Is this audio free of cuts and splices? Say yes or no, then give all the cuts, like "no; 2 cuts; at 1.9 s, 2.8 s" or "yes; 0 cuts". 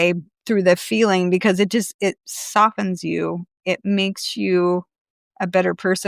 yes; 0 cuts